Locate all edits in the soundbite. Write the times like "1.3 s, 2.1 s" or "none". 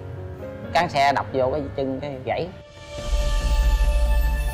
none